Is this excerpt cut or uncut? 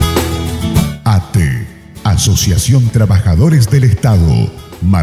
uncut